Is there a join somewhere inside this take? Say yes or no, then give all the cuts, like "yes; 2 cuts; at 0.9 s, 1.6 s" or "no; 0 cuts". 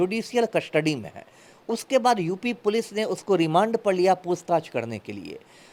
no; 0 cuts